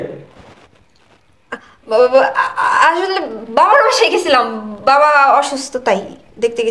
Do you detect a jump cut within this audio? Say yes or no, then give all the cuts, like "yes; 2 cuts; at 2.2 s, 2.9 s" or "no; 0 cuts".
no; 0 cuts